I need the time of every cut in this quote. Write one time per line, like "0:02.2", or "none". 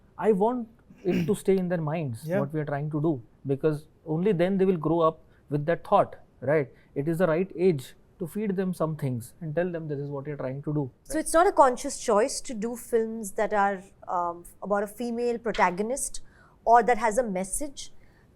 0:11.0